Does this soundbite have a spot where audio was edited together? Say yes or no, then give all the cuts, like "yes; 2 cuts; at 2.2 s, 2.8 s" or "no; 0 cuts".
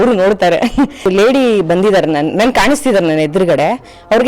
yes; 1 cut; at 1.1 s